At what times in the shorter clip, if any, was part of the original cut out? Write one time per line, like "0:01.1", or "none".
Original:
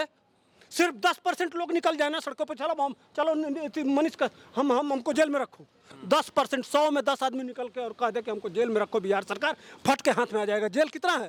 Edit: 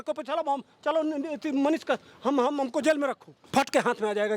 0:03.3